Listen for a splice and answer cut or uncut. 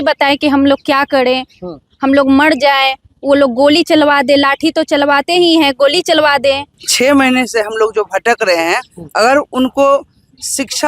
cut